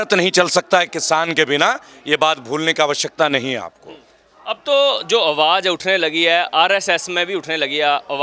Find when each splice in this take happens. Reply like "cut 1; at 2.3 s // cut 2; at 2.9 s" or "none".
none